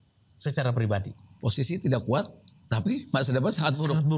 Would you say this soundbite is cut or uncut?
uncut